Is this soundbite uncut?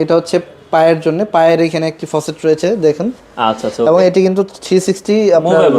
yes; 0 cuts

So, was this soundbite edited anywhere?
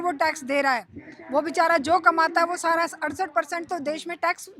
no; 0 cuts

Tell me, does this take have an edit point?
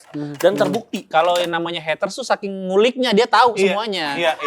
yes; 1 cut; at 1.0 s

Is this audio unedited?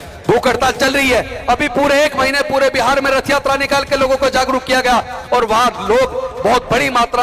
yes; 0 cuts

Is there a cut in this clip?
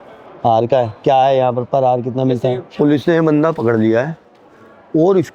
yes; 1 cut; at 2.6 s

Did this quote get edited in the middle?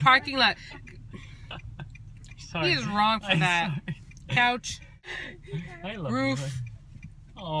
yes; 1 cut; at 5.0 s

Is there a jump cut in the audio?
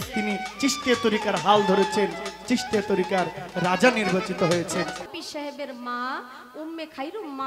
yes; 1 cut; at 5.1 s

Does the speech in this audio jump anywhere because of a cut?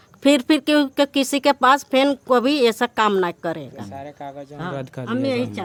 no; 0 cuts

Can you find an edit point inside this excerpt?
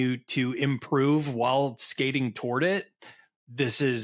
no; 0 cuts

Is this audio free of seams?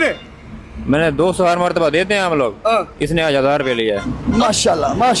no; 1 cut; at 4.1 s

